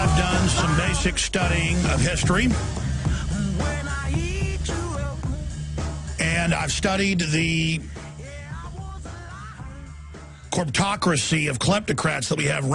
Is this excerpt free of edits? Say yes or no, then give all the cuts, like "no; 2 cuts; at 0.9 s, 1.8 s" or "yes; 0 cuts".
yes; 0 cuts